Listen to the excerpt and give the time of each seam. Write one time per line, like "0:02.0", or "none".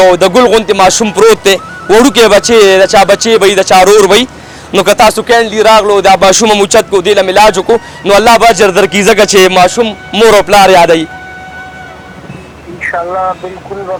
none